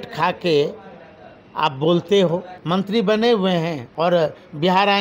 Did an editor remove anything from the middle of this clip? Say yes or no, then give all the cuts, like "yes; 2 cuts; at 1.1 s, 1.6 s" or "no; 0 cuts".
yes; 2 cuts; at 2.5 s, 3.8 s